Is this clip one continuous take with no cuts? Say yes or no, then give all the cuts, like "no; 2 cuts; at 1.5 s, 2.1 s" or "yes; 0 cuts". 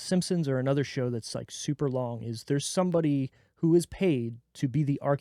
yes; 0 cuts